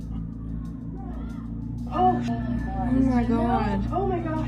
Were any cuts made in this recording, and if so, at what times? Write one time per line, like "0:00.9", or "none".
0:02.3